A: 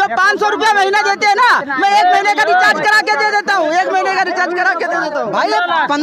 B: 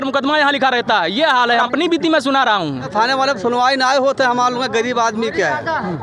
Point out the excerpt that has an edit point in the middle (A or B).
B